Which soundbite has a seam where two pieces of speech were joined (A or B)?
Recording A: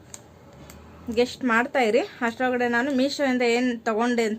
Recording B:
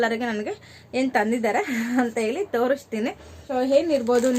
B